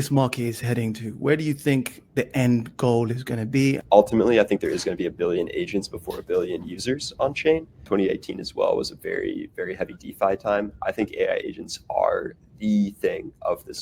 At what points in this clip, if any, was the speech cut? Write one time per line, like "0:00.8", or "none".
0:03.8
0:07.8